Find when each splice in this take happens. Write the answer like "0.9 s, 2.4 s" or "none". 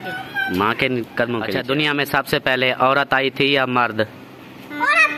1.5 s